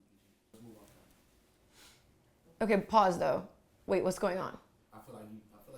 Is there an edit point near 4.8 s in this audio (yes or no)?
yes